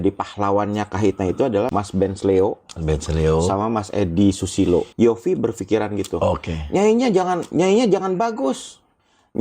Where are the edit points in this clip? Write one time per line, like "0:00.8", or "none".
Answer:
0:01.7
0:04.9